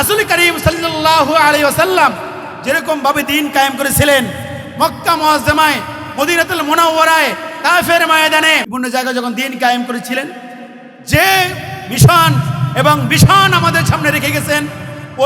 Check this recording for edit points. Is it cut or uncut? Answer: cut